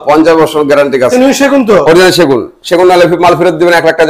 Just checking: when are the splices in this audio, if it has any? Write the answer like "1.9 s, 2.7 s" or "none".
1.1 s